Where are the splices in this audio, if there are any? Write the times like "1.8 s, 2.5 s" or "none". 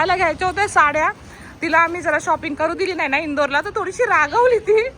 none